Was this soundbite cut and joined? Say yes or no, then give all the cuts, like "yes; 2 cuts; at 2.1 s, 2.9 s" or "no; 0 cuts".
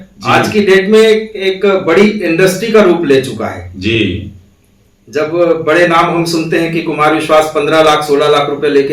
no; 0 cuts